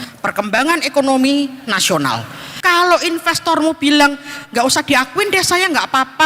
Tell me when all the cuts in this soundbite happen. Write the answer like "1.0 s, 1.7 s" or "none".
2.5 s